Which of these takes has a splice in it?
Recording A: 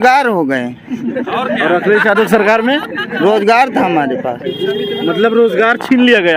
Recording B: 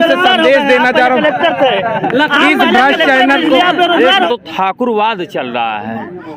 B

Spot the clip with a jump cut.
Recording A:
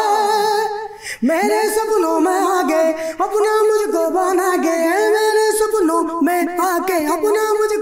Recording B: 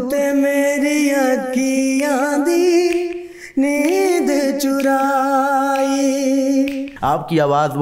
B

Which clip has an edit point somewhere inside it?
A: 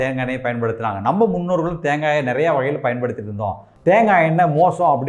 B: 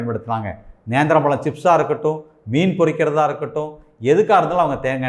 A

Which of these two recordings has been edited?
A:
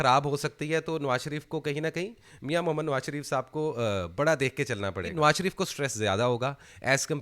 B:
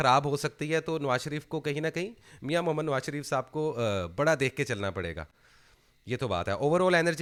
A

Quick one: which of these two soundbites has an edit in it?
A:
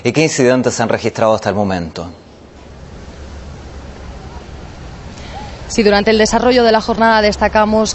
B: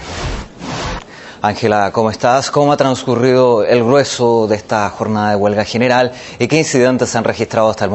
B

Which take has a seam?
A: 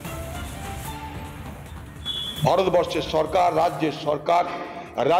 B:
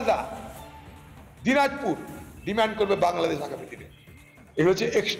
A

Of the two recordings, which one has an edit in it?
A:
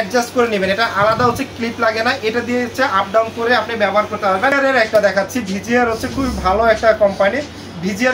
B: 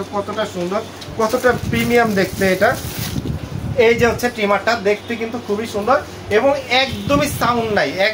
A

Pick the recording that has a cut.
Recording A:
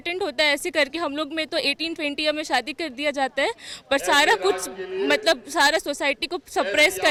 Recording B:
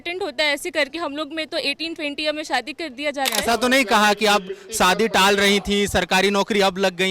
B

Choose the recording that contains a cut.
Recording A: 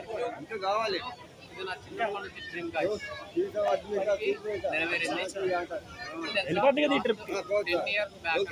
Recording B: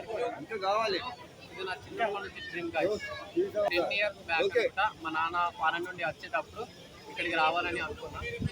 B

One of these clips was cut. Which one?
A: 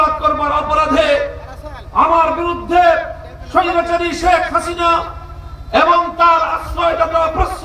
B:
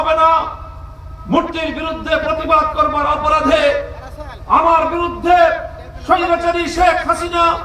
B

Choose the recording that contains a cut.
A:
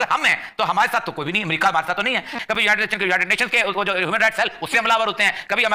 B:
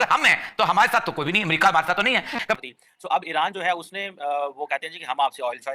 B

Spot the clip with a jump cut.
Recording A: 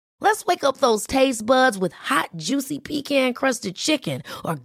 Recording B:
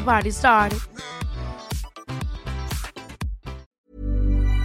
B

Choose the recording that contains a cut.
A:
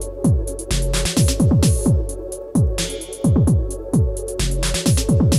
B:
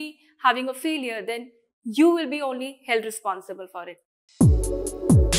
B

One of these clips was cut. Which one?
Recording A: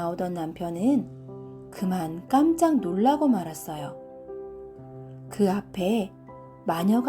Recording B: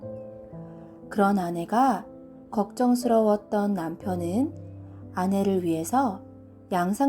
B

